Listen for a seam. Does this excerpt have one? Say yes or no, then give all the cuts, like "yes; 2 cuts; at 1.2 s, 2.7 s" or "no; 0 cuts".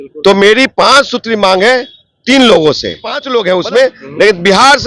yes; 1 cut; at 3.2 s